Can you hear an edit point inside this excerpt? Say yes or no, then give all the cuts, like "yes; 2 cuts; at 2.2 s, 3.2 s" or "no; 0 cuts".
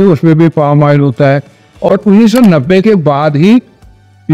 yes; 1 cut; at 1.9 s